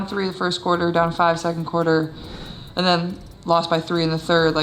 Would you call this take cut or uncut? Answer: uncut